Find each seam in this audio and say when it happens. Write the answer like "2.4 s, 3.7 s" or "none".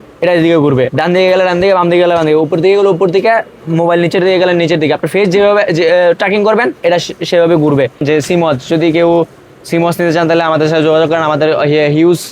8.0 s